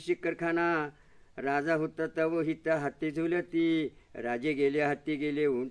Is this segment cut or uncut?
uncut